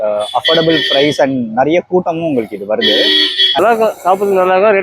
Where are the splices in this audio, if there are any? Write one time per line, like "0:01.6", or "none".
0:03.6